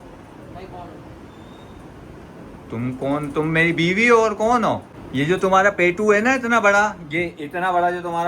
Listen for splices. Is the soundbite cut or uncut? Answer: cut